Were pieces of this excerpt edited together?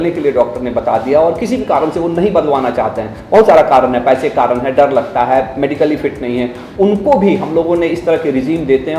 no; 0 cuts

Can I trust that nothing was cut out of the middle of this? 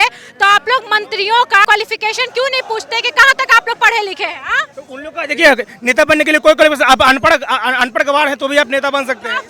yes; 0 cuts

